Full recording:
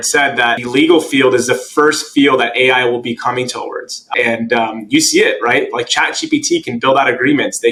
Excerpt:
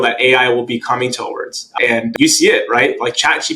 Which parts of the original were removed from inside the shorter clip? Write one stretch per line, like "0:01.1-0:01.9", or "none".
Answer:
0:04.5-0:04.8

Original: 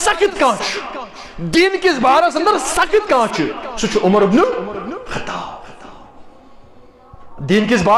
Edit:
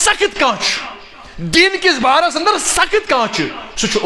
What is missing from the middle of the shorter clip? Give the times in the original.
none

